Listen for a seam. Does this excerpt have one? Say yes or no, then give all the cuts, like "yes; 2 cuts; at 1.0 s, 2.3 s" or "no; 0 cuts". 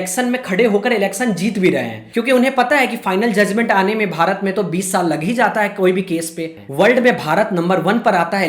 yes; 1 cut; at 6.4 s